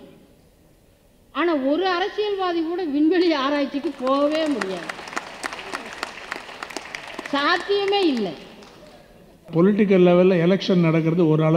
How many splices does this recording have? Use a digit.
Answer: 1